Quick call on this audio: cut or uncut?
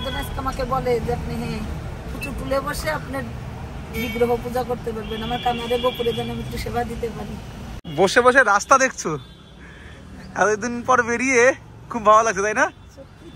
cut